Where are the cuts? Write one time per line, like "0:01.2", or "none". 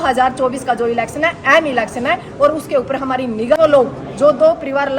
0:03.6